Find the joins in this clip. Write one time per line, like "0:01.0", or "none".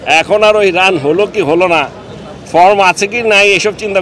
none